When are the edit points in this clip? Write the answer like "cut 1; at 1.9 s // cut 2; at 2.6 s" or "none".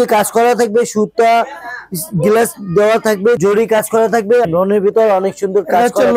cut 1; at 3.4 s // cut 2; at 4.5 s